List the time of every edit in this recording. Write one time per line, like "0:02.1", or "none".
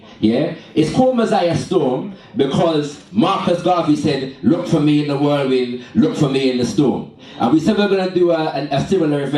0:06.4